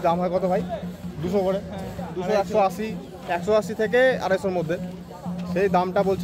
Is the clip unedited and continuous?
yes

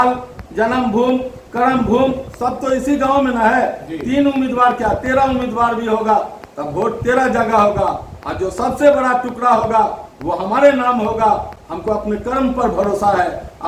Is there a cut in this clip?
no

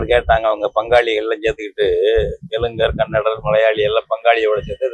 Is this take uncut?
yes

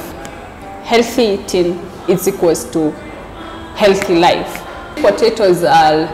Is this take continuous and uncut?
no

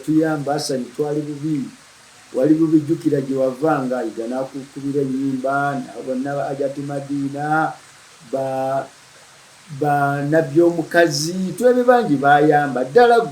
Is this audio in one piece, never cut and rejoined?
no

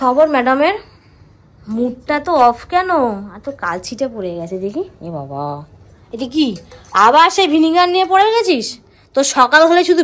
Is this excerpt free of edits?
yes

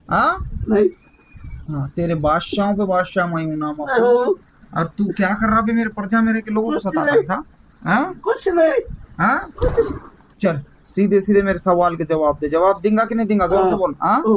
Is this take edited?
no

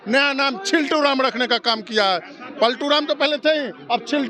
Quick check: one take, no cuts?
yes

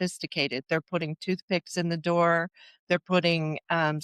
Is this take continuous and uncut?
yes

